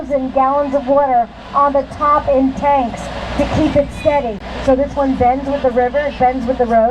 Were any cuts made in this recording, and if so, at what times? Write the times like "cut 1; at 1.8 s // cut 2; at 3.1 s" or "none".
cut 1; at 4.5 s